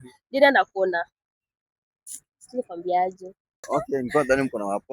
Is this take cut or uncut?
cut